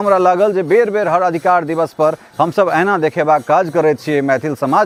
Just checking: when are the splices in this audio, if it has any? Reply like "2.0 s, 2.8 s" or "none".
none